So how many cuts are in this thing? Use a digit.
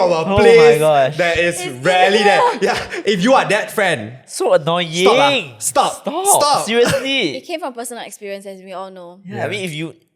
1